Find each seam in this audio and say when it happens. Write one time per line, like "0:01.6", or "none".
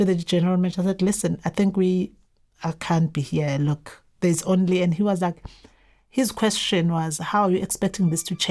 none